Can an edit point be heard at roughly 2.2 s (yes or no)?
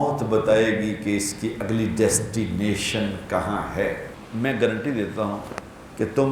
no